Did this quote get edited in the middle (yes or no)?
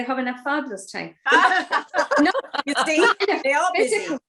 no